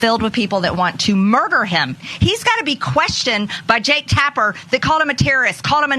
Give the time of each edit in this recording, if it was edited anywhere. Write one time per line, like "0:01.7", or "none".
0:02.0